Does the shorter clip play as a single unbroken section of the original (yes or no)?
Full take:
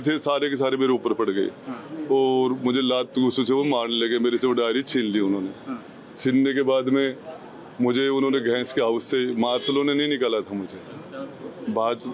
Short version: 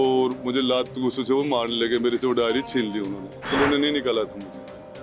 no